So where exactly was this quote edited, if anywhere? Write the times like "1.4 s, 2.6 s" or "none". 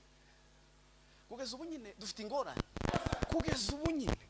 2.9 s